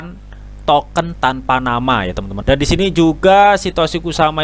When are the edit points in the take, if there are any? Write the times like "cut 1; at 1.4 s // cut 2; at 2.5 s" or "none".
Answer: cut 1; at 2.3 s